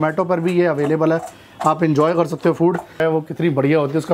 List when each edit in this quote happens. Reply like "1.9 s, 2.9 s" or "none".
3.0 s